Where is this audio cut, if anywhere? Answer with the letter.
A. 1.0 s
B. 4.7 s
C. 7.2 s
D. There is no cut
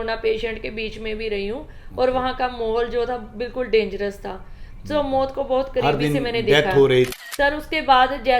C